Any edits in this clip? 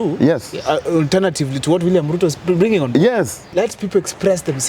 yes; 1 cut; at 3.5 s

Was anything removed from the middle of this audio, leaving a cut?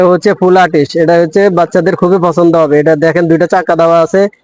no; 0 cuts

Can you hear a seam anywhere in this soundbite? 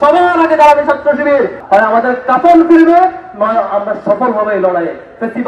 yes; 1 cut; at 1.6 s

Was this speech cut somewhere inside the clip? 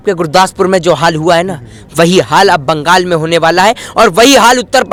no; 0 cuts

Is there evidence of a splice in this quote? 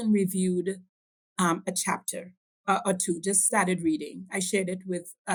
no; 0 cuts

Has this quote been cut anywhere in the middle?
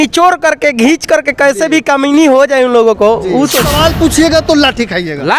yes; 1 cut; at 3.7 s

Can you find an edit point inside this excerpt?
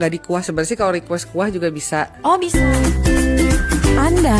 yes; 1 cut; at 2.5 s

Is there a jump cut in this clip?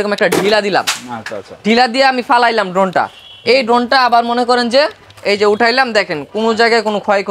no; 0 cuts

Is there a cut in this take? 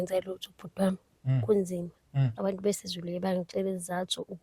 yes; 1 cut; at 2.3 s

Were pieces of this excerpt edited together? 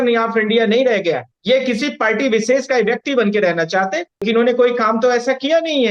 yes; 2 cuts; at 1.3 s, 4.2 s

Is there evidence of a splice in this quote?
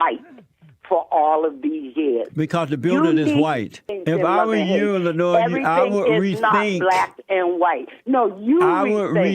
yes; 1 cut; at 4.0 s

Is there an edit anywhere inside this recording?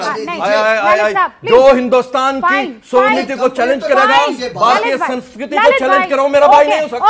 no; 0 cuts

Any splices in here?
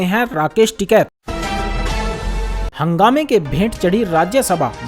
yes; 1 cut; at 1.2 s

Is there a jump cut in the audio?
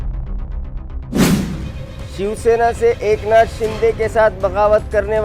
no; 0 cuts

